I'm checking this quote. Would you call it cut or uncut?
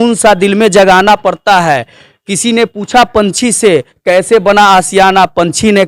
uncut